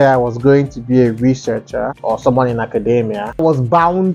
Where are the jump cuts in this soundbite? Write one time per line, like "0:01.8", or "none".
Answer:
0:01.9
0:03.4